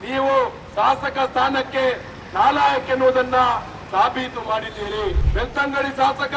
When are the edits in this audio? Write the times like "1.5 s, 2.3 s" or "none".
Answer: 5.2 s